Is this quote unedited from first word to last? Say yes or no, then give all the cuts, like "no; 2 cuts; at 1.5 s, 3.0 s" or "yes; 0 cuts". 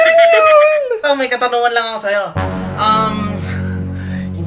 no; 1 cut; at 1.0 s